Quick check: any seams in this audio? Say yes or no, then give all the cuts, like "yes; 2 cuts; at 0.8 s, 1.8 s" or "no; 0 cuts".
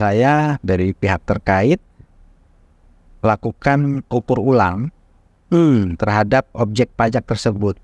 no; 0 cuts